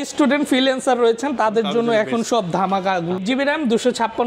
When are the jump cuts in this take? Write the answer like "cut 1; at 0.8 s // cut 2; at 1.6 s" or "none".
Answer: cut 1; at 3.2 s